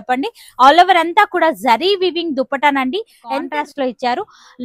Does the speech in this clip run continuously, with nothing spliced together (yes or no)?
no